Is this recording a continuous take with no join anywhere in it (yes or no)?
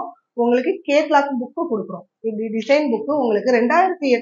yes